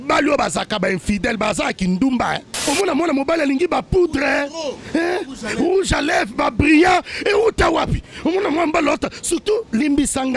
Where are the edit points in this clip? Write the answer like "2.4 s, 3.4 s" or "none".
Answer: 2.6 s